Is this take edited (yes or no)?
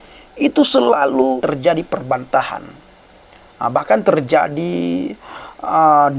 yes